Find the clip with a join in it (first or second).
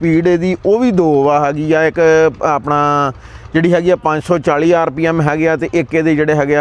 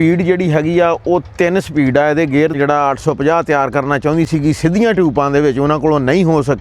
second